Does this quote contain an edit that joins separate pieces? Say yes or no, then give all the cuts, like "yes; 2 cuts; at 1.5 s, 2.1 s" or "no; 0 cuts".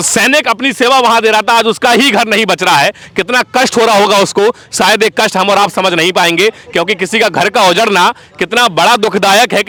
no; 0 cuts